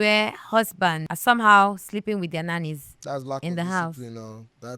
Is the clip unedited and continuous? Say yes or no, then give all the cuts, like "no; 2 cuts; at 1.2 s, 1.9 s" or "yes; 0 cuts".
no; 1 cut; at 1.1 s